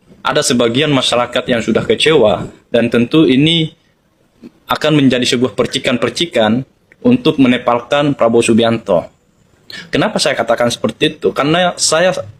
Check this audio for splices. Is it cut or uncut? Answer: uncut